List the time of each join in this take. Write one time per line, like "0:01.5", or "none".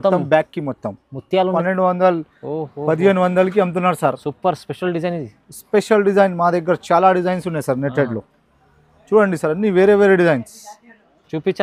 0:01.6